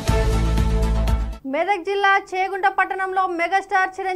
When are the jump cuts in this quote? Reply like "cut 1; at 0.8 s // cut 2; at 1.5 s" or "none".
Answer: cut 1; at 1.3 s

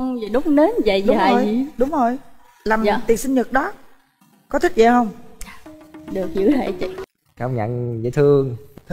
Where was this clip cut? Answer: cut 1; at 7.0 s

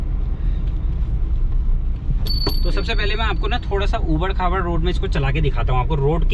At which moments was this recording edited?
none

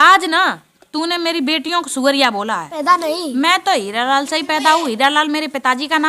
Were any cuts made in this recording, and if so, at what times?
cut 1; at 2.7 s

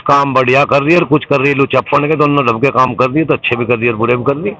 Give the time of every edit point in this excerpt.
none

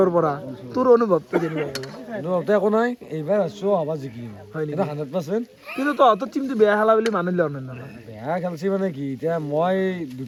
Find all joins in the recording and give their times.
none

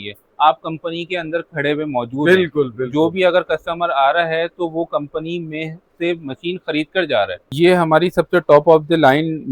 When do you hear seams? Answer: cut 1; at 7.4 s

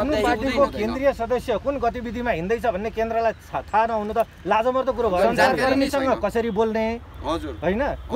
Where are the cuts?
cut 1; at 5.2 s

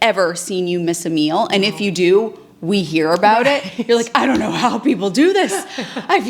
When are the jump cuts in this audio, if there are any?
none

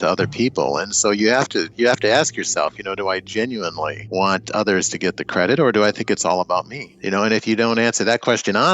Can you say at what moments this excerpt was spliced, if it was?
cut 1; at 4.0 s // cut 2; at 6.9 s

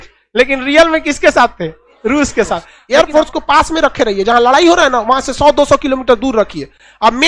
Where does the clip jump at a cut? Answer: cut 1; at 2.7 s

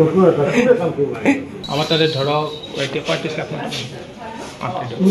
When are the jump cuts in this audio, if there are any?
cut 1; at 1.5 s

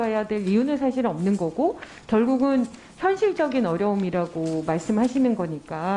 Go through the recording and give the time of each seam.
none

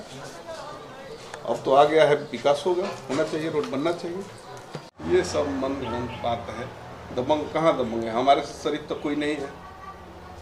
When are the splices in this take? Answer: cut 1; at 4.9 s

